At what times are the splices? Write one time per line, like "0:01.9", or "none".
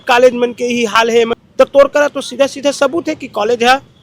0:01.4